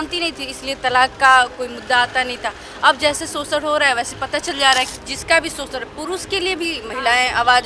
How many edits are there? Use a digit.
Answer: 1